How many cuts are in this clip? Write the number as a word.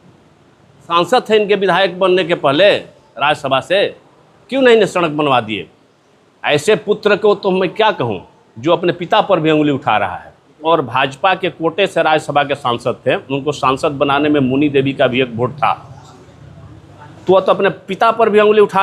two